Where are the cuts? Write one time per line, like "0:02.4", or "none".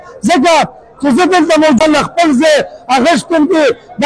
0:01.8